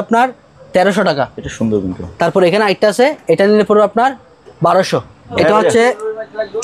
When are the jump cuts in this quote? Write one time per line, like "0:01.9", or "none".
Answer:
0:05.2